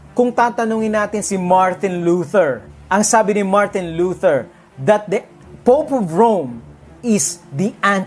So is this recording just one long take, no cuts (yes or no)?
no